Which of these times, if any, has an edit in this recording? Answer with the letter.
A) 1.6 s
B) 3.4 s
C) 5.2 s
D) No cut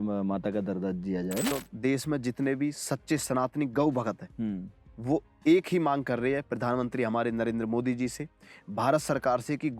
A